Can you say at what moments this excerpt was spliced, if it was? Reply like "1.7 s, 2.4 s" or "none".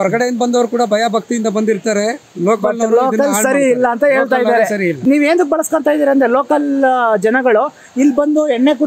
5.0 s